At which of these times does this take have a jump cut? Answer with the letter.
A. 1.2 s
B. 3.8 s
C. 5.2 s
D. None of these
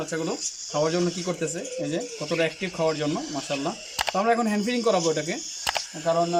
D